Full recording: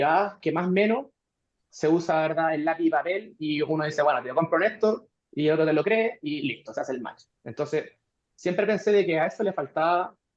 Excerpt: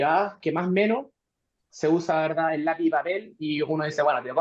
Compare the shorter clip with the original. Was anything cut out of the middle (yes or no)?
no